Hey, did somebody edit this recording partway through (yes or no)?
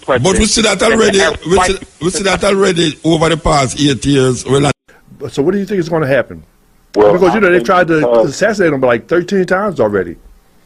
yes